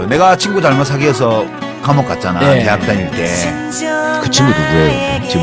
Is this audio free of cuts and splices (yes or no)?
yes